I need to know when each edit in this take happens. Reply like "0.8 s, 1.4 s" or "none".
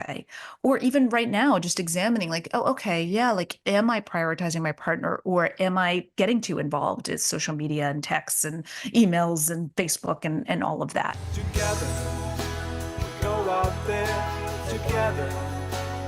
11.2 s